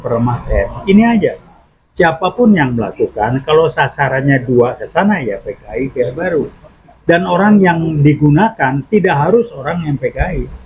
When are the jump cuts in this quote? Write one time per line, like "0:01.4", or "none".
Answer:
none

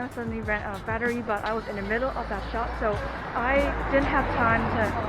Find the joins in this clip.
none

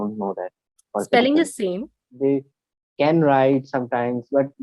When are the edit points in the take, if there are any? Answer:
0:02.0

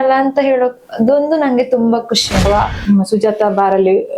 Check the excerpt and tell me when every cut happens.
0:02.5

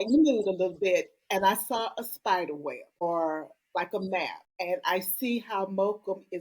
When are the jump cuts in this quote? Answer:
0:04.4

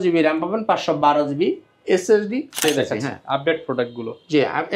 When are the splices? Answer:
0:02.6

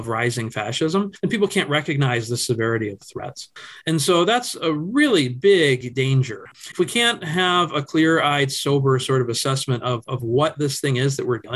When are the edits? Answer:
none

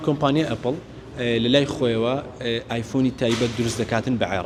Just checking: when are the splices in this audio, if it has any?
none

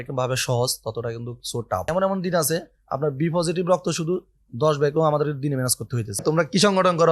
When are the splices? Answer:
0:01.9
0:06.2

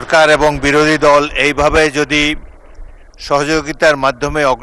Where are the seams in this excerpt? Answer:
none

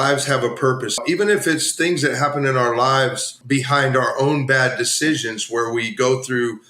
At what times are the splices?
0:01.0
0:03.3

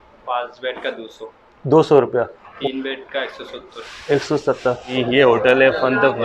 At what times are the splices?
0:02.5
0:04.9

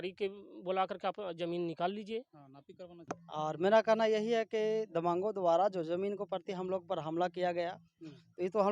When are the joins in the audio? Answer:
0:03.0

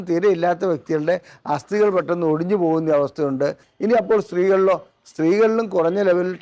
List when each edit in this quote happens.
0:03.7

